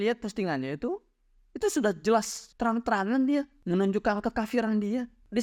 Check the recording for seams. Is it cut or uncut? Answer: uncut